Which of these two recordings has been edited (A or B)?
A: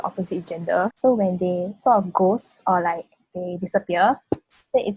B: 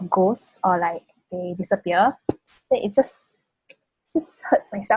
A